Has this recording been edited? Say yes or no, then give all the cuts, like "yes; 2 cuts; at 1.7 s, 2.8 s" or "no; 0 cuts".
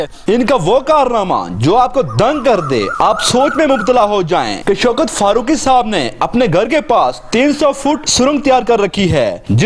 no; 0 cuts